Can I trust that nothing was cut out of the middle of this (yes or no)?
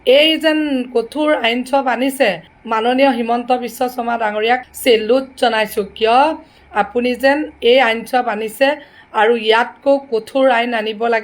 no